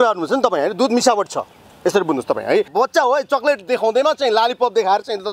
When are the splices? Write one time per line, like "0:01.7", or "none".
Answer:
0:02.7